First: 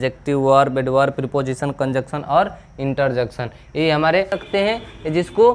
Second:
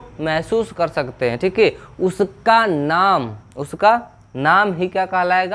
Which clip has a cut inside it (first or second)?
first